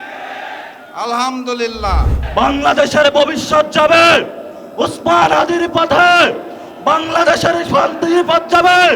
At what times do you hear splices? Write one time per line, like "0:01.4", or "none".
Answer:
0:02.2